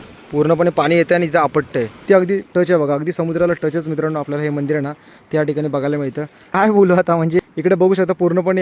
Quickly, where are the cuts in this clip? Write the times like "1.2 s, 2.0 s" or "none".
2.0 s, 6.4 s, 7.4 s